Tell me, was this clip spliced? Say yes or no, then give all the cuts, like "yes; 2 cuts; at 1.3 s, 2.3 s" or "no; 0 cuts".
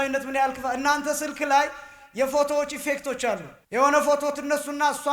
yes; 1 cut; at 3.5 s